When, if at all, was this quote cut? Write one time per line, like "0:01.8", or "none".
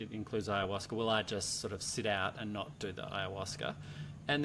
none